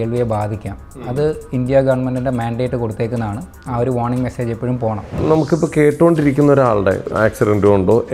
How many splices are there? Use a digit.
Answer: 2